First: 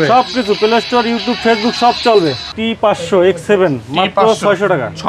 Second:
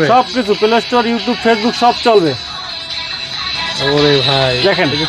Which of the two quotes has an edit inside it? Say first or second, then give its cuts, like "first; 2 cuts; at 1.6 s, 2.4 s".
first; 1 cut; at 2.5 s